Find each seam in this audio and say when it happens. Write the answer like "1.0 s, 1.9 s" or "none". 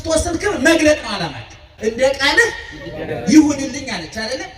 1.7 s